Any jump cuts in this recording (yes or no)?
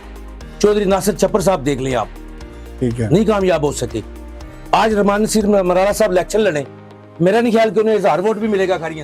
no